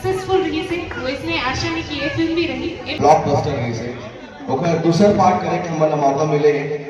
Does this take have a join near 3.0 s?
yes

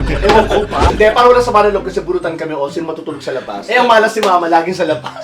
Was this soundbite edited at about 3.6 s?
yes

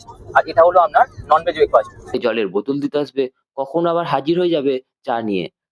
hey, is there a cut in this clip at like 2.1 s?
yes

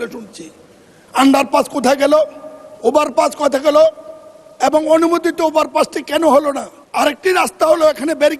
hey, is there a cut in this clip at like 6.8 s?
yes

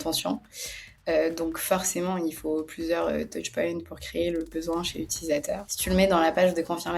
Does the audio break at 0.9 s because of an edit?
no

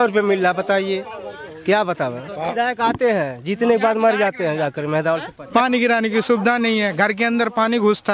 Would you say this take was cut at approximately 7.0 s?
no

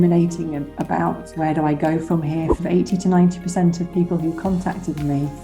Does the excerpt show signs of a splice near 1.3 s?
no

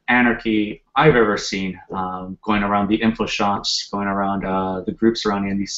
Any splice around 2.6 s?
no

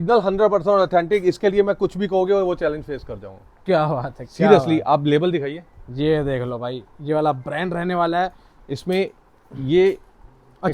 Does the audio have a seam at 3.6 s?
no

